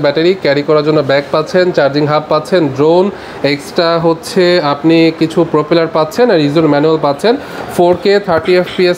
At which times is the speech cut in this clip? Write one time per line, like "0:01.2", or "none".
none